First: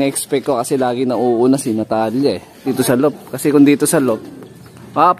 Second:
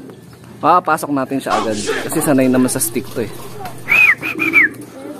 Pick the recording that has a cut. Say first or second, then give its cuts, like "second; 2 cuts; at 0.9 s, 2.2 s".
first; 1 cut; at 2.7 s